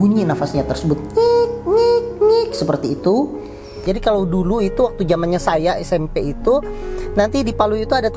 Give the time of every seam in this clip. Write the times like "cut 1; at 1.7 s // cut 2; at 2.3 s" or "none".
cut 1; at 3.8 s